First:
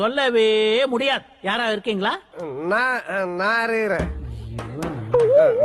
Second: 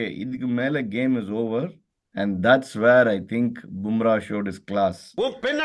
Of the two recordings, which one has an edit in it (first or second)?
first